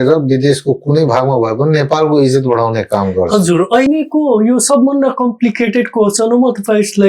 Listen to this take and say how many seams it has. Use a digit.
0